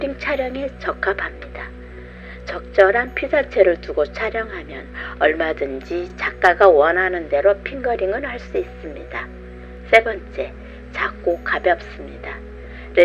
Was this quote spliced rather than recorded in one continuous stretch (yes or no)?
no